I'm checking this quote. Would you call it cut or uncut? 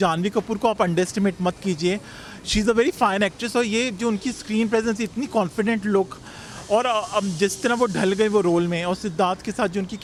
uncut